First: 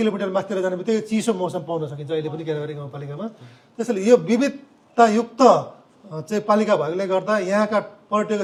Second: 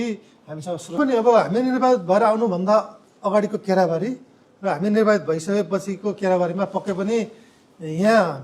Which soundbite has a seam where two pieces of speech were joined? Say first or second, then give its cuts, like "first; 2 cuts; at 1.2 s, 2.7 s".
second; 1 cut; at 1.0 s